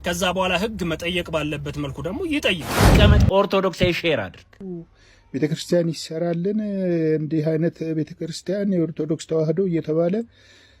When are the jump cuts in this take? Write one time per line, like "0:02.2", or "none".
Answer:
0:02.9